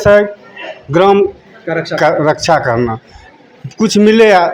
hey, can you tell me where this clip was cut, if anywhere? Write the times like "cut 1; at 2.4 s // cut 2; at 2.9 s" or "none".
none